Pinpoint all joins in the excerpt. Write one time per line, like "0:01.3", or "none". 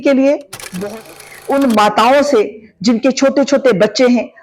0:00.9